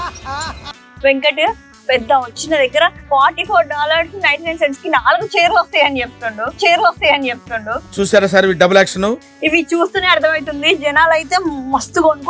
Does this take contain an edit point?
yes; 2 cuts; at 3.0 s, 9.2 s

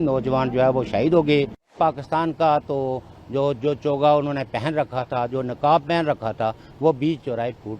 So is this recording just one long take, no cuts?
no; 1 cut; at 1.7 s

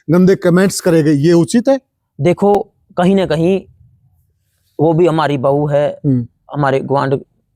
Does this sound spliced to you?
no; 0 cuts

